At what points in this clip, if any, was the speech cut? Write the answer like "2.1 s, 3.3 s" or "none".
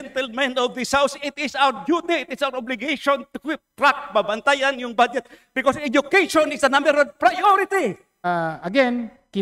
8.2 s